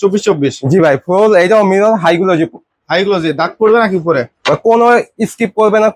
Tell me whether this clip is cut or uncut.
uncut